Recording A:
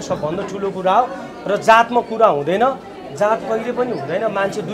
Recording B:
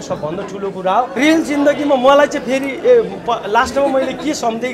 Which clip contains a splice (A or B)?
B